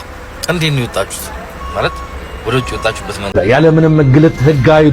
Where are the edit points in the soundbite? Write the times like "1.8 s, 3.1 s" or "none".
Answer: 3.3 s